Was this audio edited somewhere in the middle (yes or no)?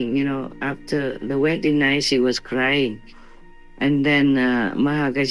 no